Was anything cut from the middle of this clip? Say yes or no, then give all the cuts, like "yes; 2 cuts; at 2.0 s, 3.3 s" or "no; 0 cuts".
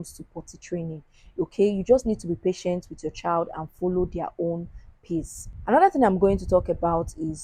no; 0 cuts